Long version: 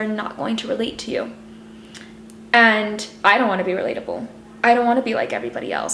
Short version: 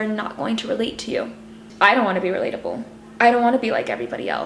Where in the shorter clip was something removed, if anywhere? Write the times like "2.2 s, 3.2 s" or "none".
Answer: 1.6 s